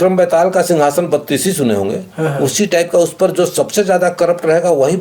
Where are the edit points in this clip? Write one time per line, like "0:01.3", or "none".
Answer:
none